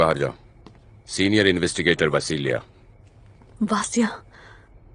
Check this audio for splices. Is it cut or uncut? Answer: uncut